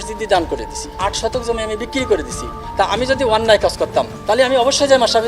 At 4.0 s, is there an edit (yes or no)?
no